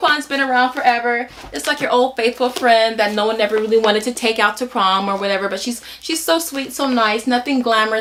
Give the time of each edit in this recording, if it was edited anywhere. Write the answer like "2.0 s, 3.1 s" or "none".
none